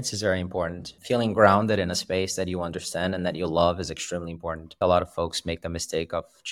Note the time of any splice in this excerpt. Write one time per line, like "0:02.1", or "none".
0:00.9
0:04.7

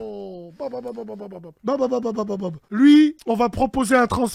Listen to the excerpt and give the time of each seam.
0:01.5
0:02.6
0:03.2

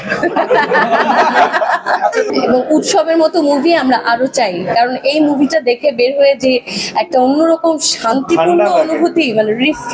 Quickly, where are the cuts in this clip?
0:02.3

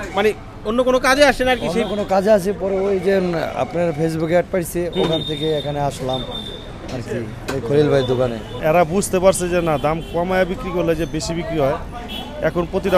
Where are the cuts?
0:08.6

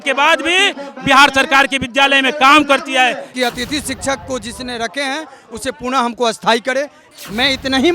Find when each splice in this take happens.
0:03.2
0:07.0

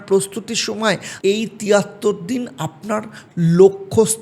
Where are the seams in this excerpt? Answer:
0:01.1

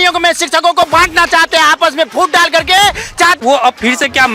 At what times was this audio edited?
0:03.4

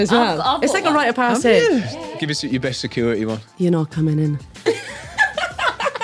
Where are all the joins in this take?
0:01.9

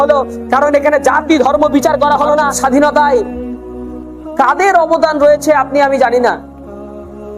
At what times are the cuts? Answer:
0:02.5

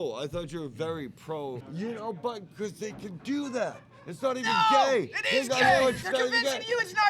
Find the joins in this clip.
0:01.6
0:06.0

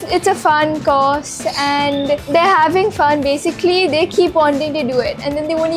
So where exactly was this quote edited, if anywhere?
none

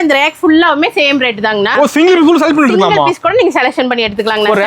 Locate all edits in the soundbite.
0:01.7

